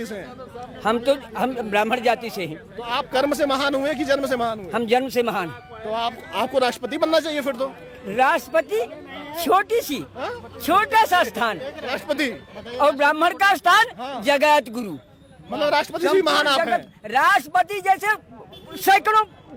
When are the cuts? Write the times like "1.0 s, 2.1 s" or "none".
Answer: none